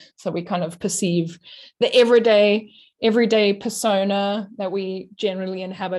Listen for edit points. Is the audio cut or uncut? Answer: uncut